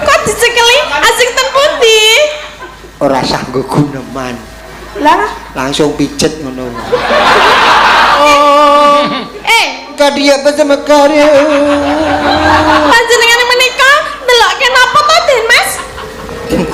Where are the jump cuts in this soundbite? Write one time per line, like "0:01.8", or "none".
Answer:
0:08.2

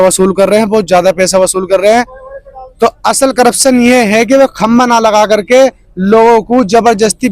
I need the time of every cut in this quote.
0:02.2

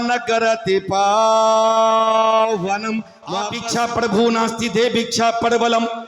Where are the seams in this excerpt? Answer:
0:03.6

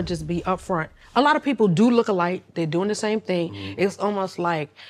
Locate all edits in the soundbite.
none

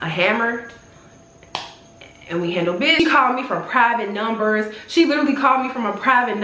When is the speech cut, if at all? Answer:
0:03.0

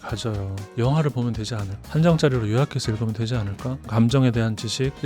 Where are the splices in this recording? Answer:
0:01.9
0:03.9

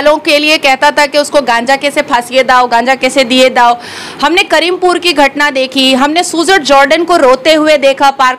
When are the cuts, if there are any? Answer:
none

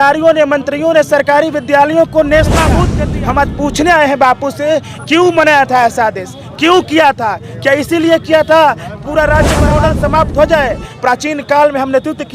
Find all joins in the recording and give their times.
0:02.9
0:09.6

